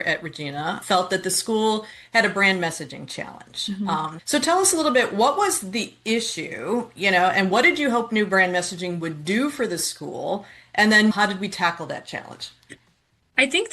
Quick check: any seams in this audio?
yes; 1 cut; at 11.1 s

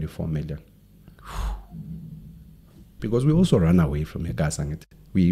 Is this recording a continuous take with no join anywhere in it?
no; 1 cut; at 2.9 s

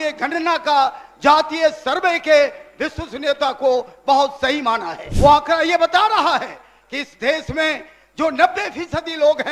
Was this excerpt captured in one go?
no; 1 cut; at 5.0 s

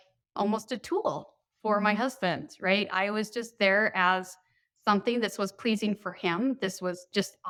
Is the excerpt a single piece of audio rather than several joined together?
yes; 0 cuts

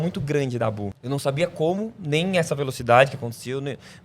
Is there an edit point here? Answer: yes; 1 cut; at 0.9 s

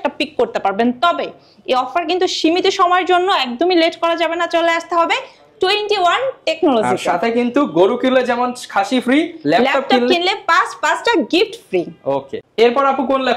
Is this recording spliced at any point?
no; 0 cuts

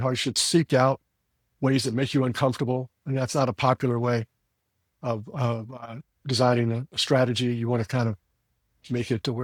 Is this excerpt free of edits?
yes; 0 cuts

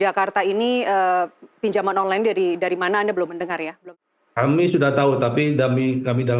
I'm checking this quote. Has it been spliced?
yes; 1 cut; at 3.9 s

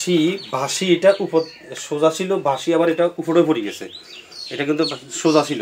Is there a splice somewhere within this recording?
no; 0 cuts

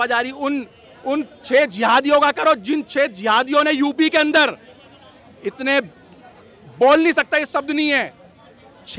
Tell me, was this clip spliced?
no; 0 cuts

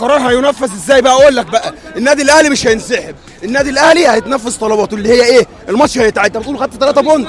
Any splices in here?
no; 0 cuts

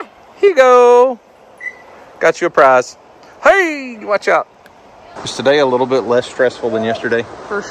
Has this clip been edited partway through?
yes; 1 cut; at 5.2 s

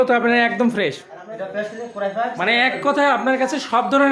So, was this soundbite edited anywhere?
yes; 1 cut; at 1.1 s

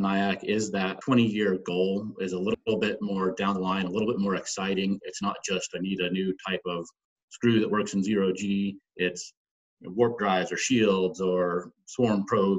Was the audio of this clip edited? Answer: yes; 2 cuts; at 1.0 s, 2.6 s

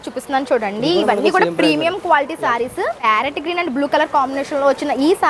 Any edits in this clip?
yes; 1 cut; at 3.0 s

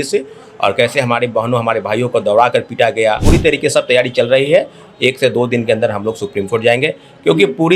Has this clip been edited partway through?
yes; 1 cut; at 3.2 s

